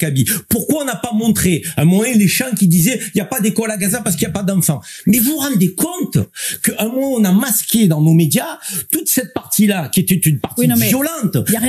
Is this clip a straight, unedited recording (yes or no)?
yes